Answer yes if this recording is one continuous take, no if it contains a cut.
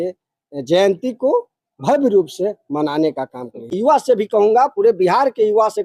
no